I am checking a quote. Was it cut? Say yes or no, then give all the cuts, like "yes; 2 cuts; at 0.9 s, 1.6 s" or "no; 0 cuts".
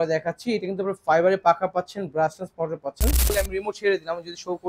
yes; 1 cut; at 3.3 s